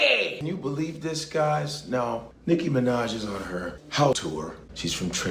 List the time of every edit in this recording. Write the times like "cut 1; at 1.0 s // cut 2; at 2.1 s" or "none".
cut 1; at 4.3 s